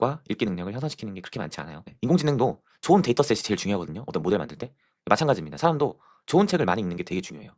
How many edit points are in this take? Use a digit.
1